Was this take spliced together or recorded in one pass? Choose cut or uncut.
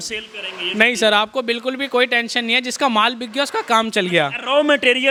uncut